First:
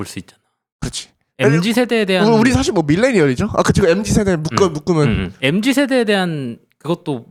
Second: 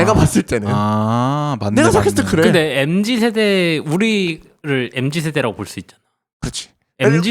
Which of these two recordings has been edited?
second; 1 cut; at 4.5 s

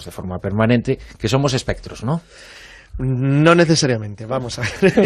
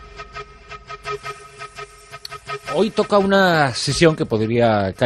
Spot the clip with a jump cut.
first; 1 cut; at 2.3 s

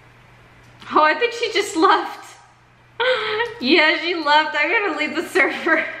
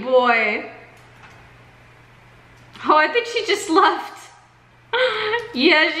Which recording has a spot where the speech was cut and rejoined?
second; 1 cut; at 1.0 s

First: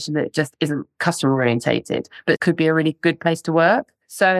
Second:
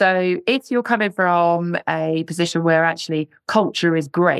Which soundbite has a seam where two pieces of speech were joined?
first; 1 cut; at 2.4 s

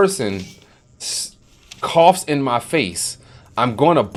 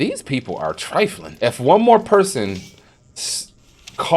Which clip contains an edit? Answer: second; 1 cut; at 1.2 s

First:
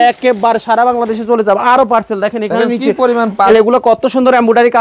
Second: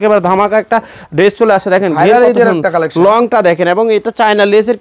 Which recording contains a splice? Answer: first; 1 cut; at 3.5 s

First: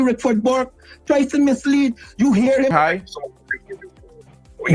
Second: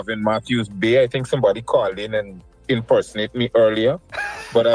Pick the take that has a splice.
first; 1 cut; at 2.7 s

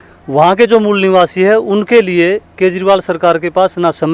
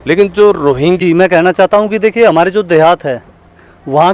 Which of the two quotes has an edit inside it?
second; 1 cut; at 1.0 s

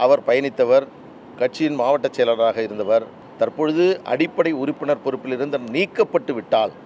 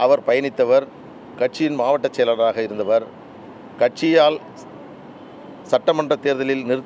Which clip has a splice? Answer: first; 1 cut; at 3.2 s

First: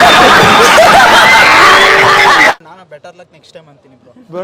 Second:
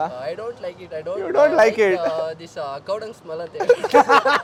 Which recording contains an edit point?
first; 1 cut; at 2.7 s

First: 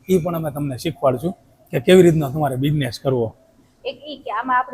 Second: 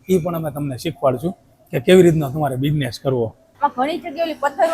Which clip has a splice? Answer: second; 1 cut; at 3.4 s

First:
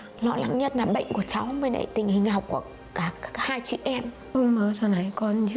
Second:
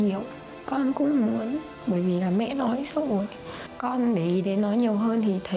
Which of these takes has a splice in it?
first; 1 cut; at 4.3 s

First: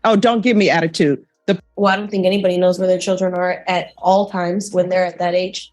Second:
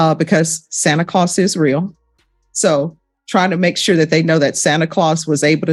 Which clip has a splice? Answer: first; 1 cut; at 1.6 s

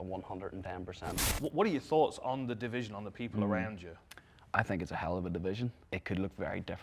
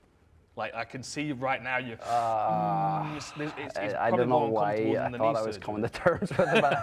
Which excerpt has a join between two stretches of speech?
first; 2 cuts; at 1.2 s, 5.8 s

